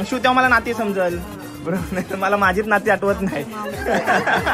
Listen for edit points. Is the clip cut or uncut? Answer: uncut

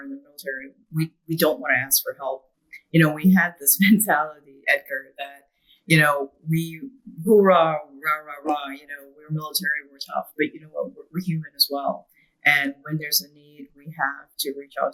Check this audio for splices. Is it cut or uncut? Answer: uncut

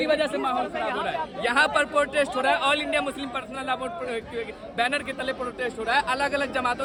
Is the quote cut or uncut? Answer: uncut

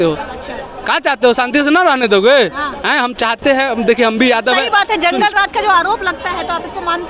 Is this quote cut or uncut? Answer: uncut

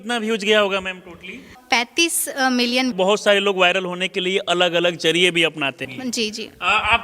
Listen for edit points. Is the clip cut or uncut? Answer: cut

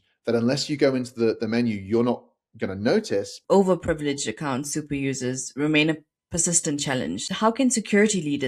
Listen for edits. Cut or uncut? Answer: cut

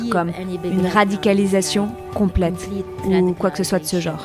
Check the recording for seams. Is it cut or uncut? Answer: uncut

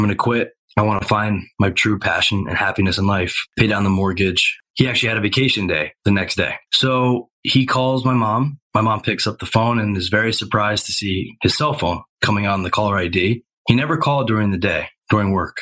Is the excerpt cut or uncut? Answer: uncut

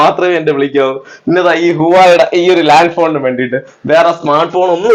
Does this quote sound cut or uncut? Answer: uncut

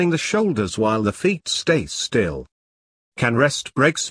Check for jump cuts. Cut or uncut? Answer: uncut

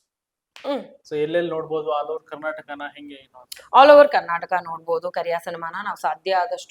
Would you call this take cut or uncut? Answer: cut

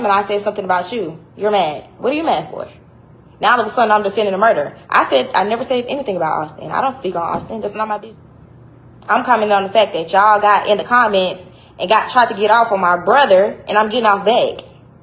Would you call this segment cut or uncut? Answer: cut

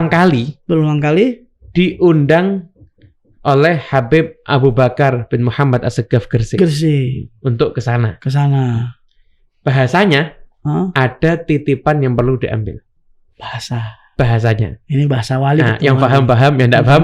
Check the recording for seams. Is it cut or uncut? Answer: uncut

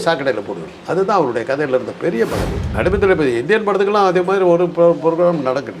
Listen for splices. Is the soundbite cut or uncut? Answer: cut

